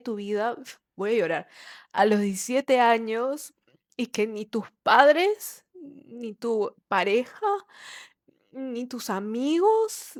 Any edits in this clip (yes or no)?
no